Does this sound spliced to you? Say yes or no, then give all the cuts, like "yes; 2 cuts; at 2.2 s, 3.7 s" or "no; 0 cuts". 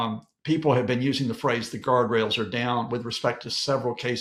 no; 0 cuts